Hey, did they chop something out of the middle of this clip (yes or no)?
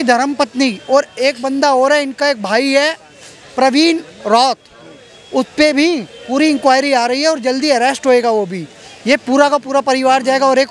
no